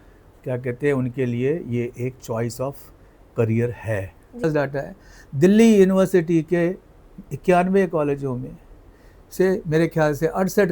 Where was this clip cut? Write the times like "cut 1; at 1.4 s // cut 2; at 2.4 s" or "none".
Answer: cut 1; at 4.4 s